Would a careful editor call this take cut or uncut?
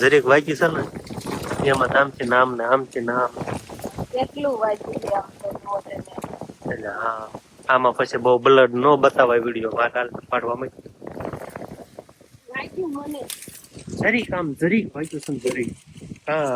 uncut